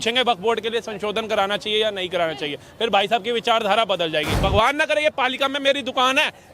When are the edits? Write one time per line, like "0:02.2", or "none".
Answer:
0:04.4